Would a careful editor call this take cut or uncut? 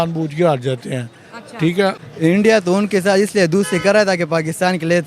cut